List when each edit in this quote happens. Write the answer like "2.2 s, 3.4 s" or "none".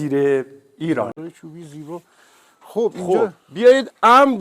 1.2 s